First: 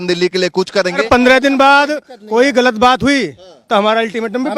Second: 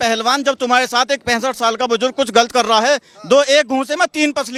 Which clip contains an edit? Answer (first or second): first